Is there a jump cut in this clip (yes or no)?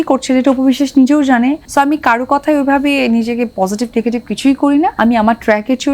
yes